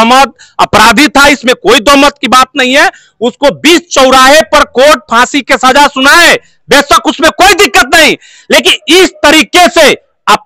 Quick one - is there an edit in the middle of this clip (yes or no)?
no